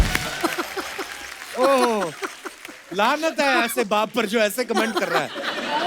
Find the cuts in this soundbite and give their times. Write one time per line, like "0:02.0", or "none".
none